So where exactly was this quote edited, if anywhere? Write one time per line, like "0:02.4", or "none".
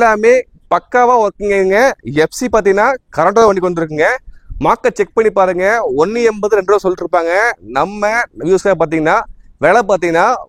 none